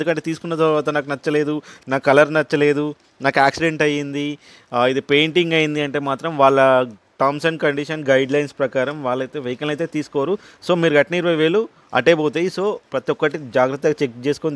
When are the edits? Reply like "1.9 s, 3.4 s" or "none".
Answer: none